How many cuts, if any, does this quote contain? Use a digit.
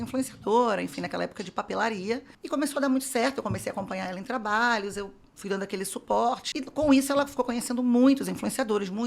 2